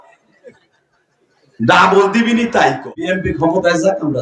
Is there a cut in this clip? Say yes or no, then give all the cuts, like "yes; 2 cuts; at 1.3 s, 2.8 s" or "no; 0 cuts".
yes; 1 cut; at 3.1 s